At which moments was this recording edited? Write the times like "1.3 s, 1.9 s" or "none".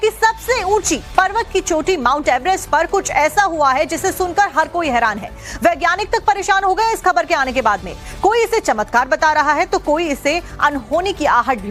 1.3 s